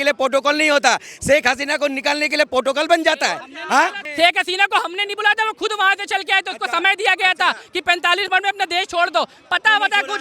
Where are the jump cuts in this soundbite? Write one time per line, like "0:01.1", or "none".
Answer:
0:04.0